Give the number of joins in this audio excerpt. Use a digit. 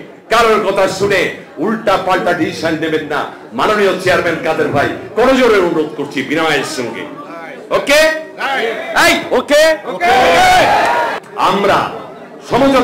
1